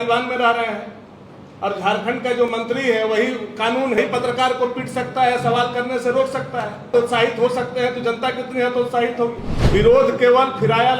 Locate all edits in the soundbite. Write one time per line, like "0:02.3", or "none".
0:04.0
0:06.9
0:09.5